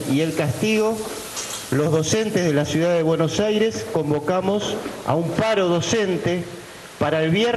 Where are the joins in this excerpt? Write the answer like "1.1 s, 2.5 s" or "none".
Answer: none

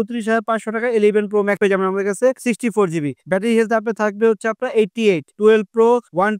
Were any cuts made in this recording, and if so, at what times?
5.3 s

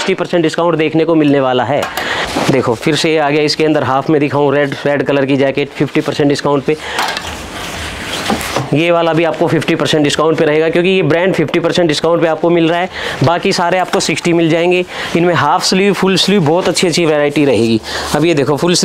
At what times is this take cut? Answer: none

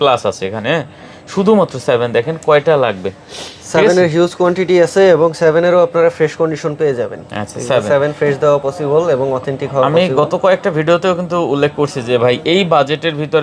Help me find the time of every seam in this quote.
none

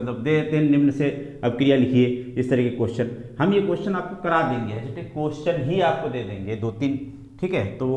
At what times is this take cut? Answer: none

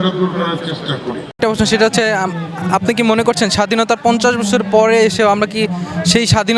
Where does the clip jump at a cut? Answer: 1.3 s

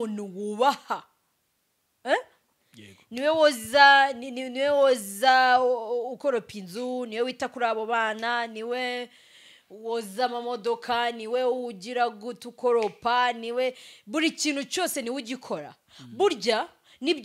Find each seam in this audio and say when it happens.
none

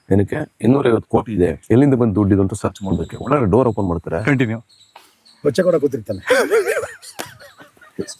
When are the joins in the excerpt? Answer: 1.6 s

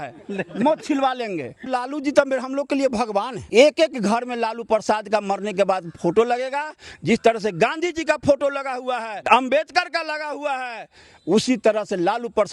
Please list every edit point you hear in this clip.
1.7 s, 3.4 s, 9.1 s

